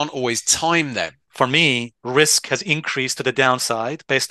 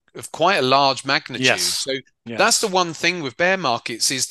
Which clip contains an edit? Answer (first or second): first